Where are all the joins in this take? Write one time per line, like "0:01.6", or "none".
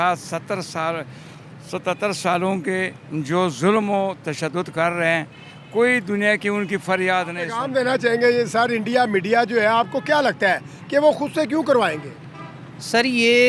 0:07.4